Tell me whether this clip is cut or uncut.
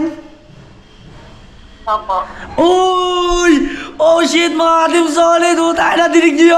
uncut